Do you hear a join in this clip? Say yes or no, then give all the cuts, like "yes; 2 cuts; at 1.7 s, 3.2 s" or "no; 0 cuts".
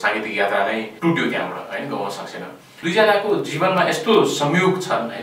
yes; 2 cuts; at 0.9 s, 2.6 s